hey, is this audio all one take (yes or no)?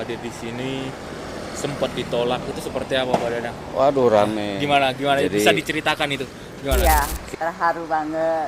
no